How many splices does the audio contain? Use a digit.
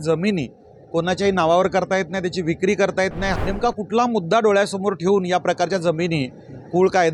1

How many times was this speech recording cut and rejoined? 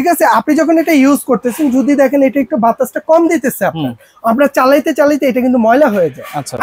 0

